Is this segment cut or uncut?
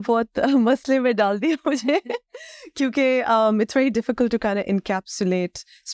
uncut